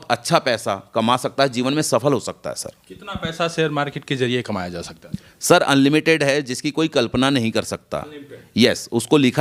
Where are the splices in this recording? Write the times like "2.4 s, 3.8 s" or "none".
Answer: none